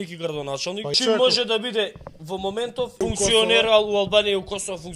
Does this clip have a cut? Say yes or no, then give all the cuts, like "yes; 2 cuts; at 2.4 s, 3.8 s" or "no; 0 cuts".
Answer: yes; 2 cuts; at 1.0 s, 3.0 s